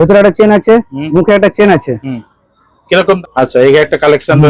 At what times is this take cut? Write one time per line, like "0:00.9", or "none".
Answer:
0:03.2